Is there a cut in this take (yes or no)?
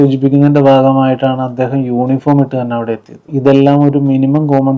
no